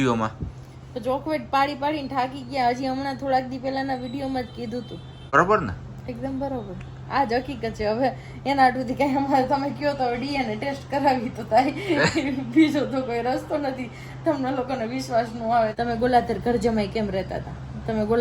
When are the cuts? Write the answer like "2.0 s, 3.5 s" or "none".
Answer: 5.3 s, 15.7 s